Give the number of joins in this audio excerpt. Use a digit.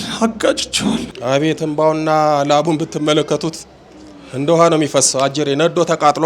1